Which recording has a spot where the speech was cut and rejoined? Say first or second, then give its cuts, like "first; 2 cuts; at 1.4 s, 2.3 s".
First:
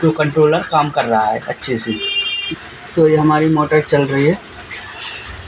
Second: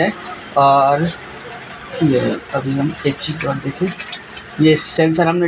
first; 1 cut; at 2.3 s